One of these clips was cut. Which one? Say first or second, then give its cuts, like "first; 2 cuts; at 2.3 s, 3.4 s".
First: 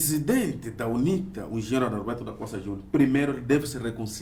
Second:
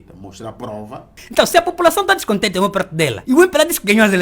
second; 2 cuts; at 1.2 s, 3.2 s